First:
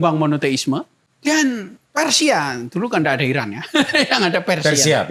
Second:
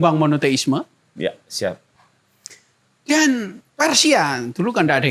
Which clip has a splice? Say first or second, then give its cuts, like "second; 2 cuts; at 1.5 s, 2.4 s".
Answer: first; 1 cut; at 1.0 s